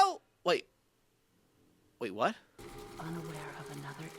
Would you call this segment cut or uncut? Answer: cut